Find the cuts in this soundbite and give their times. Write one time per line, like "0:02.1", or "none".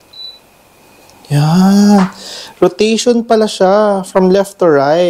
none

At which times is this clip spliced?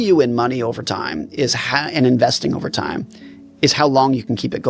none

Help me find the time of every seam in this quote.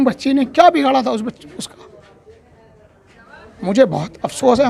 none

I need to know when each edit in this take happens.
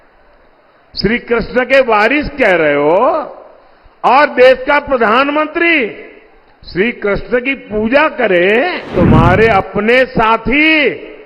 0:08.9

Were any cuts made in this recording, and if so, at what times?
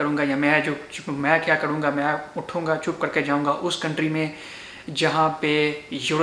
none

